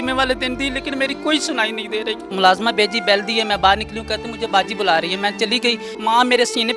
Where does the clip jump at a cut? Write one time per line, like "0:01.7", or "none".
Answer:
0:02.2
0:05.9